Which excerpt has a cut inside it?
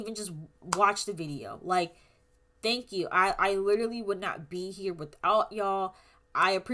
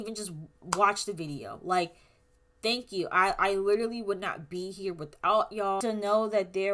second; 1 cut; at 5.8 s

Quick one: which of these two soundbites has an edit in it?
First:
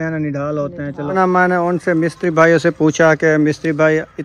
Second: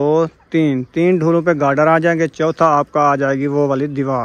first; 1 cut; at 1.1 s

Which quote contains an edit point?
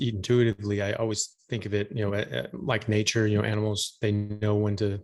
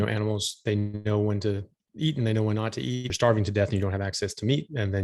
second; 1 cut; at 3.1 s

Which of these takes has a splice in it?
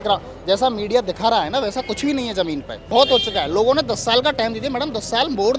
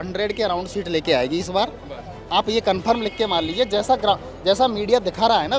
first; 1 cut; at 2.9 s

